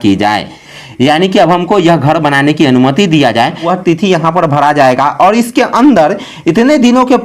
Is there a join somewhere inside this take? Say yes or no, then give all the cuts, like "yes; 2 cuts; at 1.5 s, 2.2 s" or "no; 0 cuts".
yes; 1 cut; at 3.7 s